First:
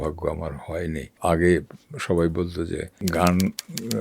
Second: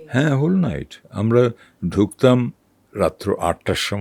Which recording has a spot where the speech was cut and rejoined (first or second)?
first